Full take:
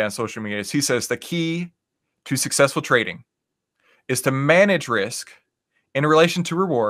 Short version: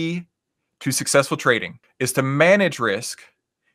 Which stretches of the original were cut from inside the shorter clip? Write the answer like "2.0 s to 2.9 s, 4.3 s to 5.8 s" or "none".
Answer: 3.2 s to 3.9 s